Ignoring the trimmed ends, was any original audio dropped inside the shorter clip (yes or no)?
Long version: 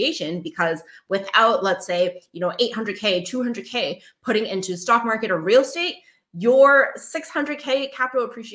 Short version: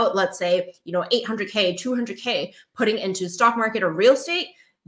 no